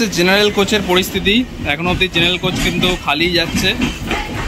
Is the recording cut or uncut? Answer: uncut